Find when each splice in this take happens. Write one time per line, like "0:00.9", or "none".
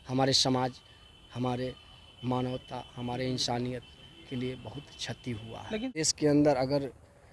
0:06.1